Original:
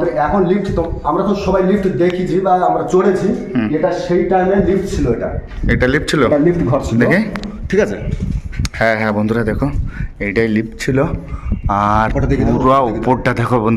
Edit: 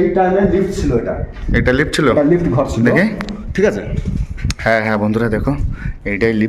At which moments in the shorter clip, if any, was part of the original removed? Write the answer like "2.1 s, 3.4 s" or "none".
none